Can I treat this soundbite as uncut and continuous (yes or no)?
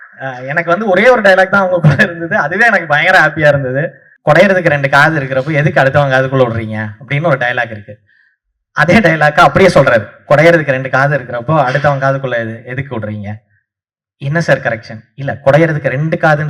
no